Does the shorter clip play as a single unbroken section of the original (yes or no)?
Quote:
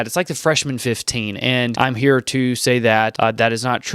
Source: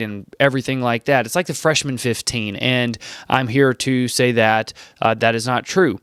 no